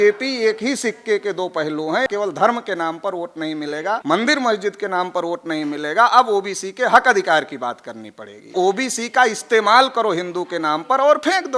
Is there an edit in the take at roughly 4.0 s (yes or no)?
yes